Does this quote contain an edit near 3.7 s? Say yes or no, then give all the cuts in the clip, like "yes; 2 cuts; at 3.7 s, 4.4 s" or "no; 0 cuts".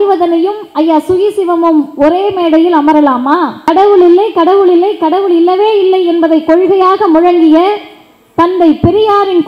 yes; 1 cut; at 3.7 s